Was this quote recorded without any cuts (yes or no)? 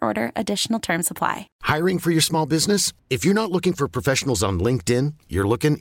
no